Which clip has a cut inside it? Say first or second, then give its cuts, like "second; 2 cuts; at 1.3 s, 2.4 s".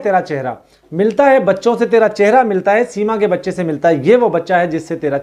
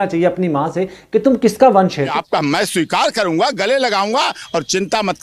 second; 1 cut; at 2.2 s